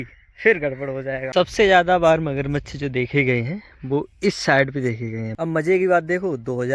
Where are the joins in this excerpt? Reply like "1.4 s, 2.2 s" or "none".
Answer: 1.3 s, 5.3 s